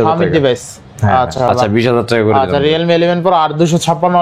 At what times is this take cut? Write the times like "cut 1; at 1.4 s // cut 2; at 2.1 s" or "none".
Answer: cut 1; at 1.4 s